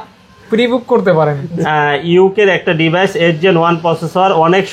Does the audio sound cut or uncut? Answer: cut